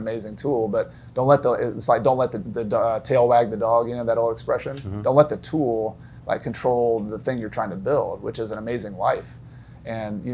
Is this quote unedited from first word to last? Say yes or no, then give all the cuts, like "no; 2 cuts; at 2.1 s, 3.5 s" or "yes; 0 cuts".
yes; 0 cuts